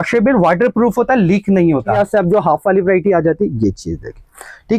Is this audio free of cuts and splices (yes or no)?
no